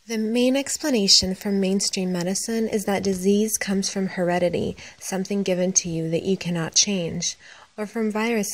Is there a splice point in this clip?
yes; 1 cut; at 3.5 s

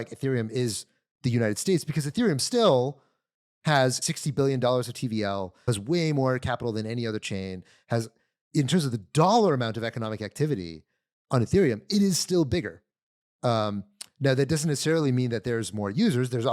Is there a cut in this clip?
yes; 2 cuts; at 4.0 s, 5.7 s

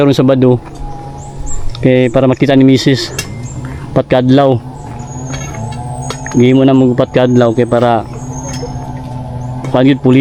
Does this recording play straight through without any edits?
yes; 0 cuts

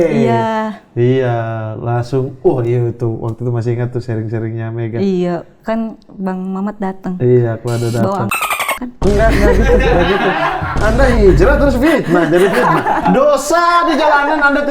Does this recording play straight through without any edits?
yes; 0 cuts

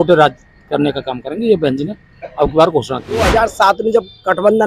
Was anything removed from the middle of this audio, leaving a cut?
yes; 1 cut; at 3.2 s

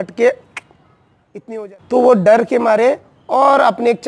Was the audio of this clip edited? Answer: yes; 1 cut; at 1.5 s

